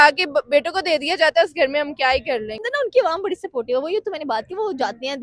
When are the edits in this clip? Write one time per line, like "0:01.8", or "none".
0:02.6